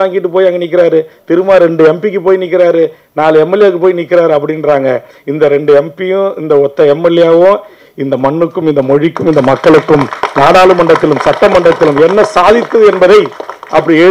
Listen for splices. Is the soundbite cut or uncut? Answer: uncut